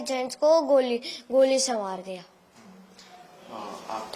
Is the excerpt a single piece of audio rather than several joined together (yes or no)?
yes